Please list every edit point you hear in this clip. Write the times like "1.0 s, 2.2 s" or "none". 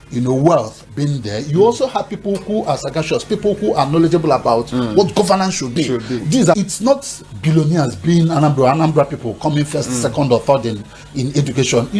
6.6 s